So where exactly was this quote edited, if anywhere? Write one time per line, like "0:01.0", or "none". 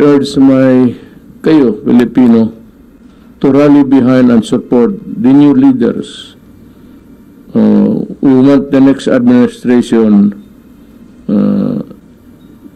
none